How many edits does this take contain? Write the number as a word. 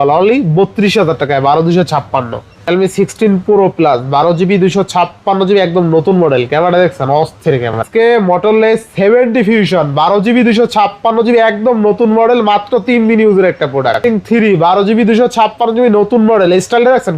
three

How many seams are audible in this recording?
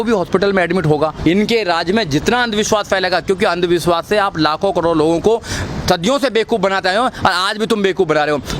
one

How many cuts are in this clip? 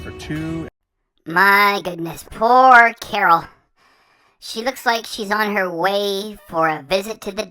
zero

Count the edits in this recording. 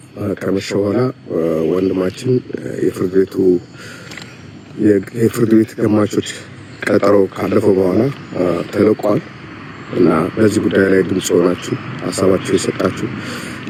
zero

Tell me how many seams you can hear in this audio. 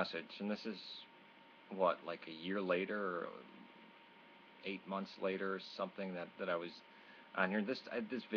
zero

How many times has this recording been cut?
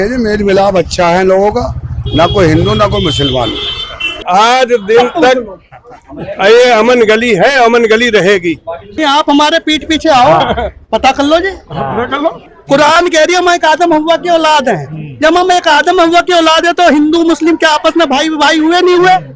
three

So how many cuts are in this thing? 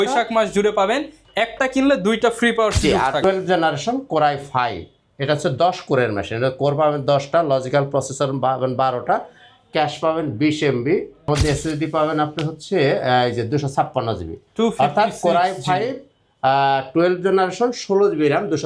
two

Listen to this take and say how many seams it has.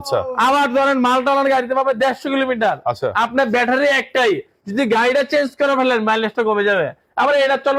zero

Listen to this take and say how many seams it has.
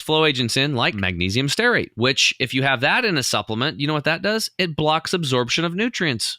two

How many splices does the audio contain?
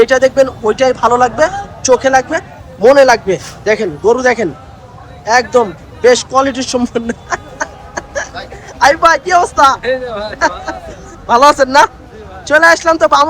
zero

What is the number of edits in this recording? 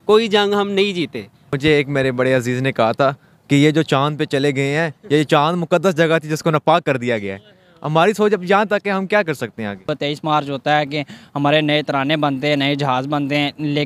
two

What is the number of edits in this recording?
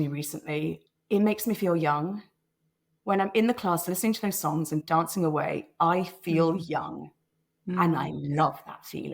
two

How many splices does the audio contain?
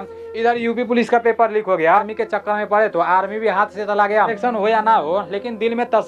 two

